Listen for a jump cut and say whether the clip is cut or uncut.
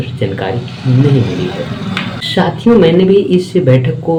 uncut